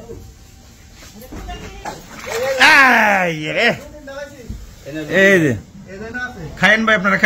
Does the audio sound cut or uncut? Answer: cut